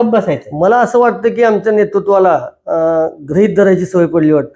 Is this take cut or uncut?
uncut